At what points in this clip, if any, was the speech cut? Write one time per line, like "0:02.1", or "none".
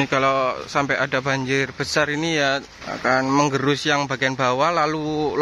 0:02.8